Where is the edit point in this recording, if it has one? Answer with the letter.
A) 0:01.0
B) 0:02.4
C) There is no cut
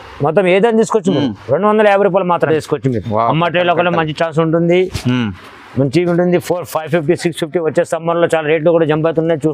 B